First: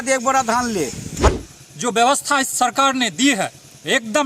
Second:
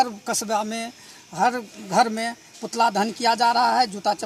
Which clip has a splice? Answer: first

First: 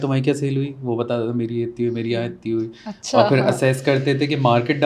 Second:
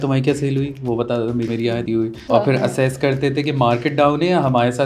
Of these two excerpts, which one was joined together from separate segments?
second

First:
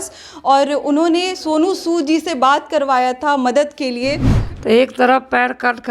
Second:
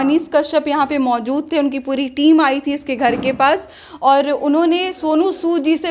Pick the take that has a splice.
first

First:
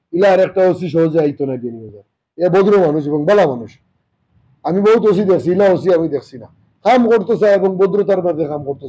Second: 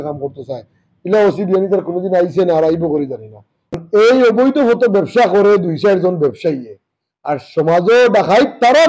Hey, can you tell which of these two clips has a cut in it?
second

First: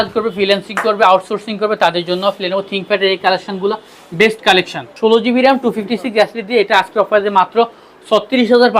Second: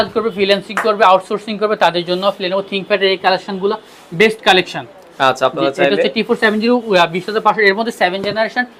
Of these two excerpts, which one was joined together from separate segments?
first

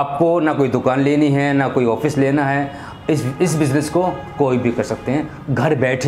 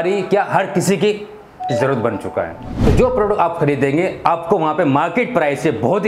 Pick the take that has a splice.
second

